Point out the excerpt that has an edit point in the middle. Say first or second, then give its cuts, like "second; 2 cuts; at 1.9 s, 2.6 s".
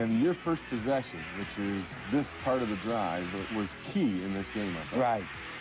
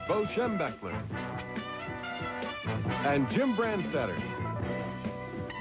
first; 1 cut; at 2.0 s